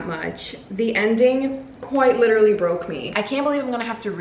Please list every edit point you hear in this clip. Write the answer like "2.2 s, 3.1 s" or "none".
3.1 s